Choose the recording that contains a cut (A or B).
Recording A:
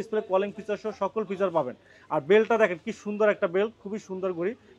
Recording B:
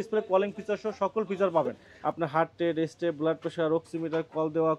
B